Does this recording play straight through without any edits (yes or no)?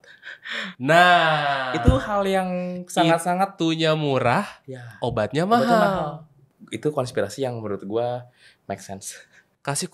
yes